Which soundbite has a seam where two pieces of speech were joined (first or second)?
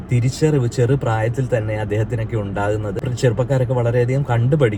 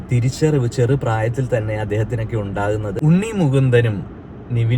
second